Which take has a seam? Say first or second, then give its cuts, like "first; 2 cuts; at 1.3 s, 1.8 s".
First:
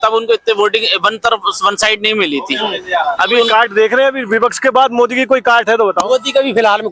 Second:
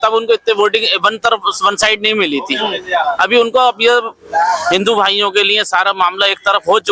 first; 1 cut; at 3.5 s